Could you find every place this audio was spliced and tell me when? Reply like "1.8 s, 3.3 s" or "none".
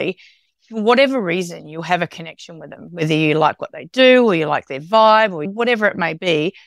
5.5 s